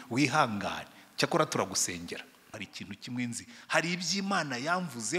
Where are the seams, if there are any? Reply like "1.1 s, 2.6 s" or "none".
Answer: 2.6 s